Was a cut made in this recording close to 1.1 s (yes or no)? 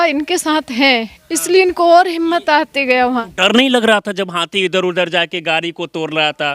no